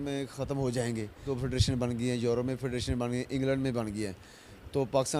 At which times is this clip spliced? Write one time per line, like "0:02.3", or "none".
0:01.3